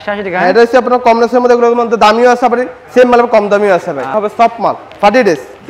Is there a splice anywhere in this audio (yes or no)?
yes